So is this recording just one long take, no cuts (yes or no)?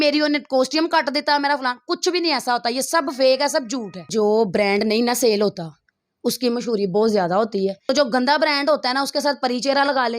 no